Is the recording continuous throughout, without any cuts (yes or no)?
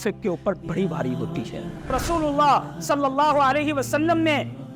no